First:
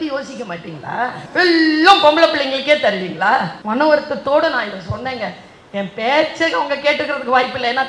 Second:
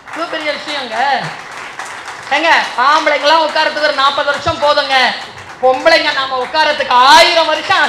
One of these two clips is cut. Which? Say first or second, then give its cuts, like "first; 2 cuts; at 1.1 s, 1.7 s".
first; 2 cuts; at 1.2 s, 3.6 s